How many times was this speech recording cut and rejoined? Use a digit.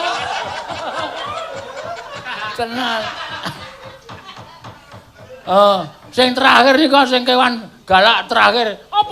1